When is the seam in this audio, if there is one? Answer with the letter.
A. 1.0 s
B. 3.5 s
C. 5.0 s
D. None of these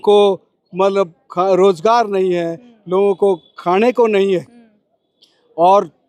D